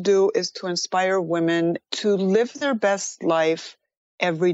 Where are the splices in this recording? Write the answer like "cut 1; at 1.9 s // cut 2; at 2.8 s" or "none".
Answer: cut 1; at 1.8 s // cut 2; at 2.6 s